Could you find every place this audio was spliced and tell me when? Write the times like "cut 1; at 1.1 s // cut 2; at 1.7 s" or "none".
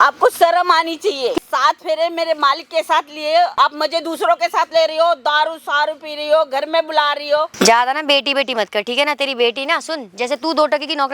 cut 1; at 1.4 s // cut 2; at 3.5 s // cut 3; at 7.5 s